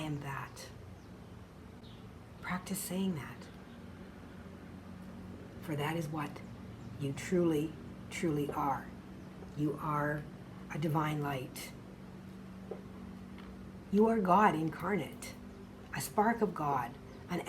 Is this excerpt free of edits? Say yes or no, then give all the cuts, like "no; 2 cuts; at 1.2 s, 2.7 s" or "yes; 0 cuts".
no; 1 cut; at 1.8 s